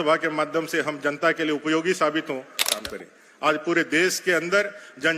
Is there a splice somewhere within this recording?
yes; 1 cut; at 2.6 s

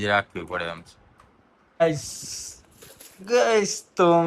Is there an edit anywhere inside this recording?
yes; 1 cut; at 1.6 s

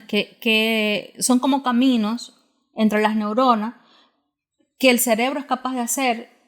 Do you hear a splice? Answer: no; 0 cuts

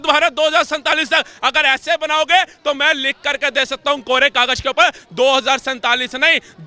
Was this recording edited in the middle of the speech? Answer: no; 0 cuts

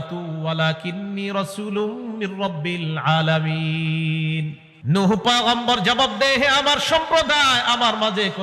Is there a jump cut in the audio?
yes; 1 cut; at 4.7 s

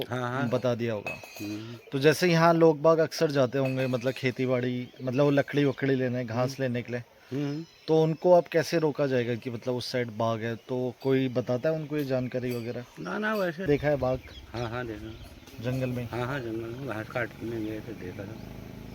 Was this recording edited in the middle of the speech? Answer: yes; 1 cut; at 13.7 s

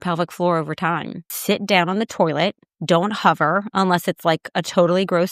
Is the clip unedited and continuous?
no; 1 cut; at 1.3 s

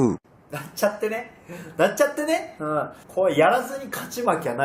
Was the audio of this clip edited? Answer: yes; 1 cut; at 1.3 s

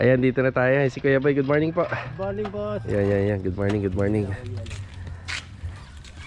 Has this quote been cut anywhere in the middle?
no; 0 cuts

